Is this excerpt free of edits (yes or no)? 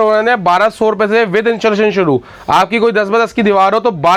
yes